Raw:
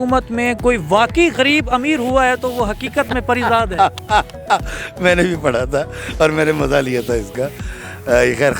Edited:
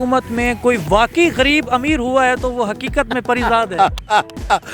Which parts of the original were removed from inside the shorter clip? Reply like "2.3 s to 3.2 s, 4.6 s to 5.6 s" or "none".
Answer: none